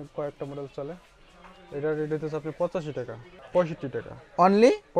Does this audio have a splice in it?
yes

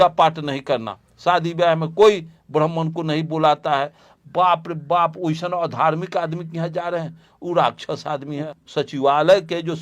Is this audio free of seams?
no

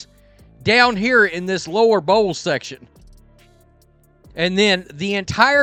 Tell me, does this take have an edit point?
no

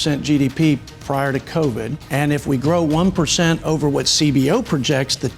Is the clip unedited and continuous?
no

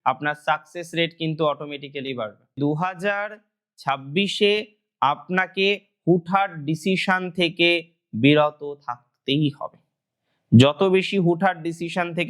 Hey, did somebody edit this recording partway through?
yes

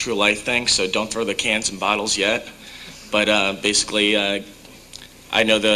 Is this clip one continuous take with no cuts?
yes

